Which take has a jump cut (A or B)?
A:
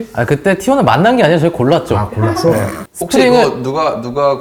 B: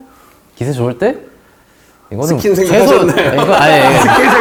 A